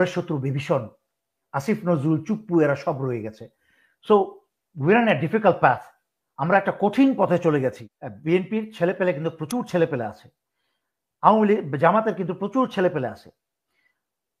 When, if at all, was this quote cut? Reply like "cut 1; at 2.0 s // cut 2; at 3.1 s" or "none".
cut 1; at 7.9 s